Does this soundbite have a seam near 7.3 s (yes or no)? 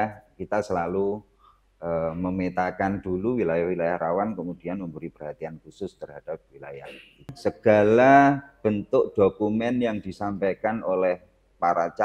yes